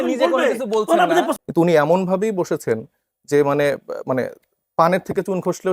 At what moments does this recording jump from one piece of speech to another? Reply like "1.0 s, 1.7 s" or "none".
1.3 s